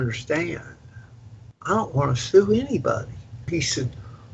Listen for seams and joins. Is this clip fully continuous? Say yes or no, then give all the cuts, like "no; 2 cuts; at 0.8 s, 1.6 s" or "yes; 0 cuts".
no; 1 cut; at 3.4 s